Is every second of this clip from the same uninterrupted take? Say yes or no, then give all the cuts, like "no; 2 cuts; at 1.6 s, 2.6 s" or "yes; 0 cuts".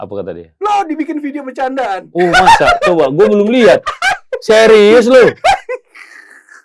yes; 0 cuts